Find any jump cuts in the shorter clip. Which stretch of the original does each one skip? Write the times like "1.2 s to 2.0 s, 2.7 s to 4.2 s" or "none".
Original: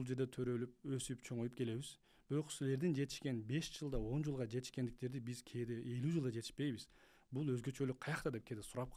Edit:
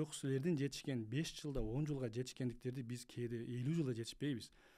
none

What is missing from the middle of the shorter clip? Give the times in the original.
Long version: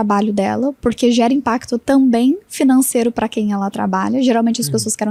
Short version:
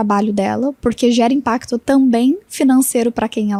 none

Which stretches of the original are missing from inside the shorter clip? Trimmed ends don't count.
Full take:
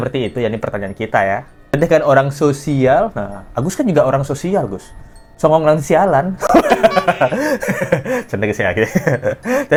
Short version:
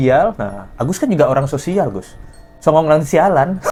none

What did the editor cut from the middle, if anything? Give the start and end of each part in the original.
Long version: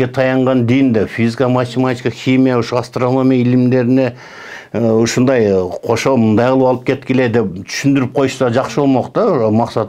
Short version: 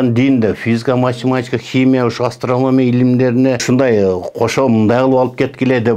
4.2 s to 5.1 s

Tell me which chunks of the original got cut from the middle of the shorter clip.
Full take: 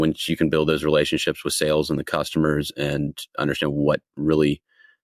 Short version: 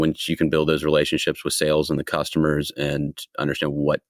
none

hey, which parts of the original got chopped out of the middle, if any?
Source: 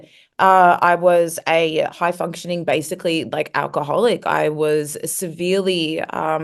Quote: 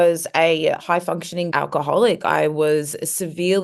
2.6 s to 3.5 s

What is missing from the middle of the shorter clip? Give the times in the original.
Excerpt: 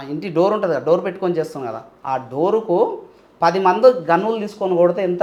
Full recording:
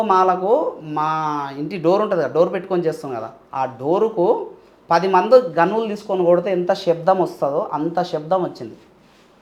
none

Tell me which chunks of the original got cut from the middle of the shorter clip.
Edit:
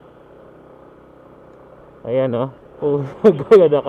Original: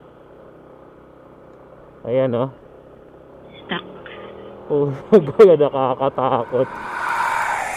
2.6 s to 4.5 s

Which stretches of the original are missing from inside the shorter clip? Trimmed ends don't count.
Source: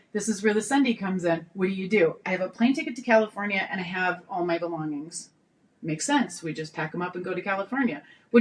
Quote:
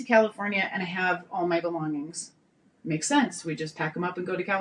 none

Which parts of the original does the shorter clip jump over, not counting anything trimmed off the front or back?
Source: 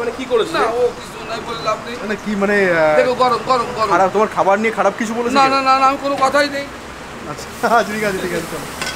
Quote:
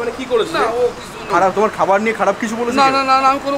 1.3 s to 3.9 s

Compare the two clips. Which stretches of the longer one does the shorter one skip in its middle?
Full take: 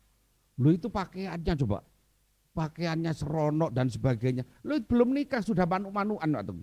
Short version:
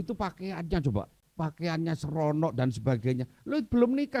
2.0 s to 2.4 s

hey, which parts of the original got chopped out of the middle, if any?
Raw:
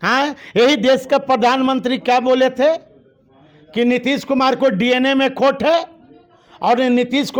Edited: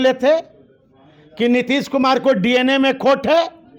none

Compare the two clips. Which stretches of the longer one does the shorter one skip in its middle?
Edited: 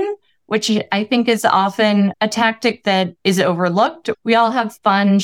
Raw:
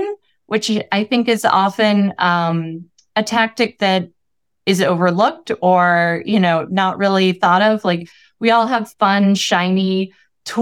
2.1 s to 3.1 s, 4.1 s to 4.6 s, 5.5 s to 8.2 s

